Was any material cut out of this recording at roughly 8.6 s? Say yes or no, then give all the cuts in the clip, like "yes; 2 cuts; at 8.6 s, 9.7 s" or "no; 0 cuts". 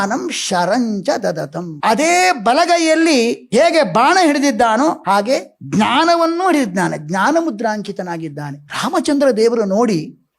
no; 0 cuts